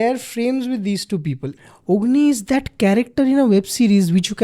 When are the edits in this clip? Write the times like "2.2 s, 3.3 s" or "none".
1.5 s